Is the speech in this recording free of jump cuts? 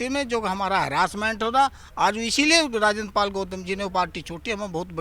yes; 0 cuts

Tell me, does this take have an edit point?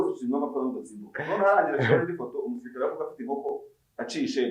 no; 0 cuts

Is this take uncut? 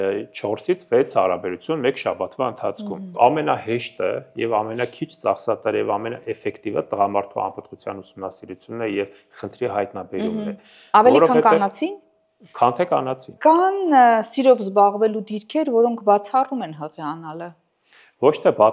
no; 2 cuts; at 3.1 s, 13.3 s

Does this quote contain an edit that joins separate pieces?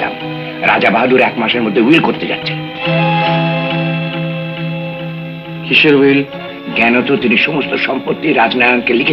no; 0 cuts

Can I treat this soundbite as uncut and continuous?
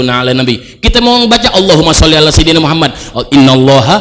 yes; 0 cuts

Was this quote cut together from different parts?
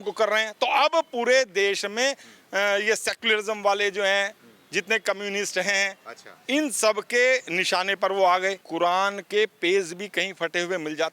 yes; 1 cut; at 8.6 s

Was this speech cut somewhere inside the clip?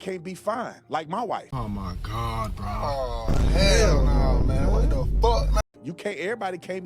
yes; 1 cut; at 1.4 s

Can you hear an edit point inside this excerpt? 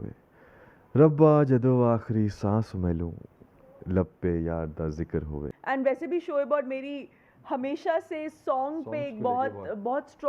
yes; 1 cut; at 5.5 s

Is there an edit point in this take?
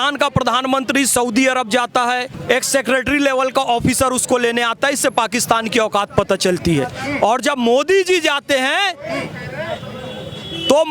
yes; 1 cut; at 2.3 s

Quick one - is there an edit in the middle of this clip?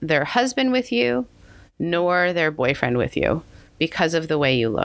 no; 0 cuts

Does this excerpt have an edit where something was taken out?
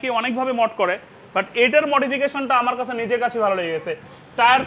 no; 0 cuts

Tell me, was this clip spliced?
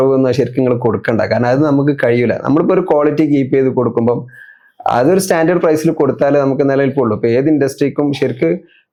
no; 0 cuts

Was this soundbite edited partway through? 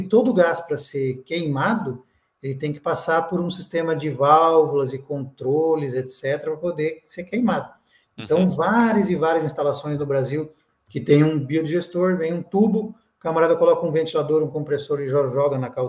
no; 0 cuts

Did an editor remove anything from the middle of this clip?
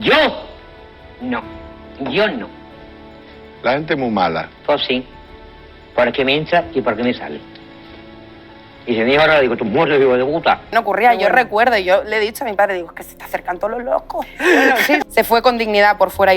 yes; 2 cuts; at 10.7 s, 15.0 s

